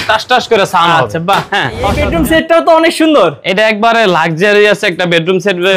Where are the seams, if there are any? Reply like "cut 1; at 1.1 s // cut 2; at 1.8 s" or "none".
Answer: cut 1; at 2.0 s